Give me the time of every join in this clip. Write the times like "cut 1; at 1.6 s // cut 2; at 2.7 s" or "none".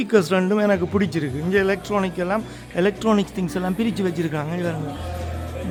none